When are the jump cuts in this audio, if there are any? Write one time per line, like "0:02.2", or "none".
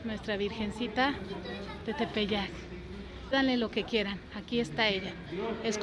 0:03.3